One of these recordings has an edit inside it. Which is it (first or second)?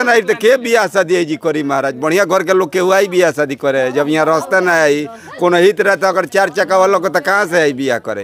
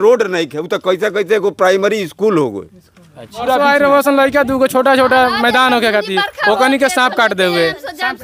second